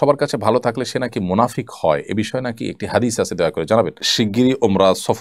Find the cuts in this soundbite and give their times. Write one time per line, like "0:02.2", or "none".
0:04.0